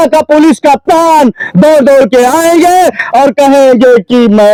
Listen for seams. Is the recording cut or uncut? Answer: uncut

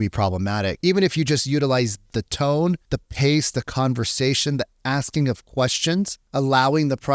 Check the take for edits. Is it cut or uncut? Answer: cut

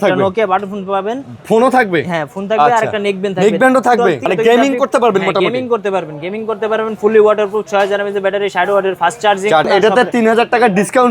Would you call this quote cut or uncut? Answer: cut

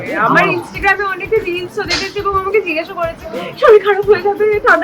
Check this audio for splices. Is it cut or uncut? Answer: uncut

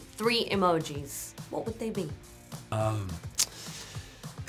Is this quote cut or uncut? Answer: cut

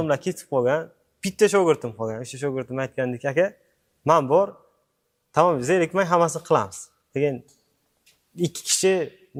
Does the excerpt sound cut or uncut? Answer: uncut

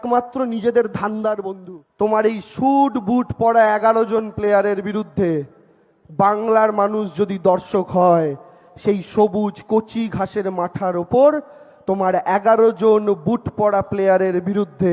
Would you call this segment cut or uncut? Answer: cut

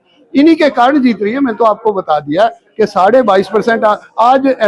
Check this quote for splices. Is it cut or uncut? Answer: uncut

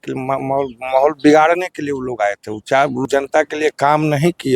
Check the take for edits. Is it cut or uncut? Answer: cut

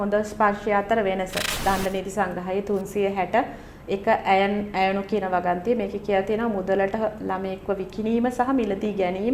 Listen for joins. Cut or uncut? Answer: cut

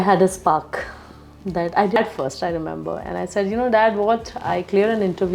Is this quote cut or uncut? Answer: cut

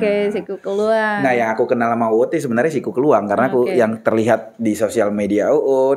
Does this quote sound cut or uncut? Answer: uncut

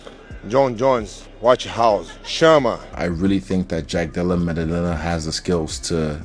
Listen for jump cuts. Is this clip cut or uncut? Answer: cut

